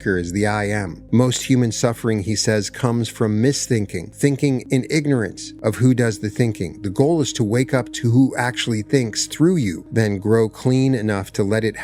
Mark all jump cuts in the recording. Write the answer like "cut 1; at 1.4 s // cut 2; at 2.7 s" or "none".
cut 1; at 0.9 s // cut 2; at 4.1 s // cut 3; at 4.6 s // cut 4; at 5.4 s // cut 5; at 9.8 s